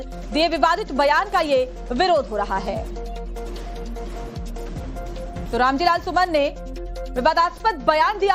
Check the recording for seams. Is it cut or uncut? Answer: uncut